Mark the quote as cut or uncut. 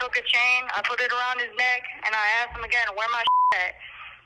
uncut